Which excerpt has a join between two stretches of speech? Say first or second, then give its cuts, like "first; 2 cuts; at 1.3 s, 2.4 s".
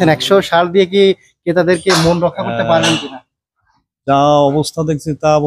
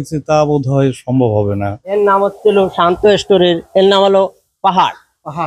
second; 1 cut; at 1.8 s